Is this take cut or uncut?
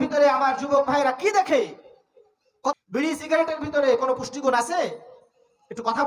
cut